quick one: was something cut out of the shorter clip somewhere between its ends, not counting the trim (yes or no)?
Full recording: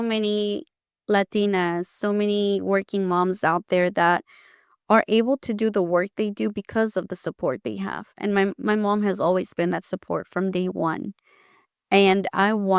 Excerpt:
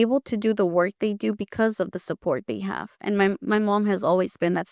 no